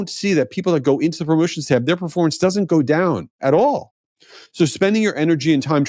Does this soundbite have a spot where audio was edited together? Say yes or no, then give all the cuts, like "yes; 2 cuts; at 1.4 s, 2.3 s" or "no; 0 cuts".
no; 0 cuts